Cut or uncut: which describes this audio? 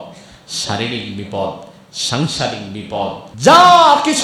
cut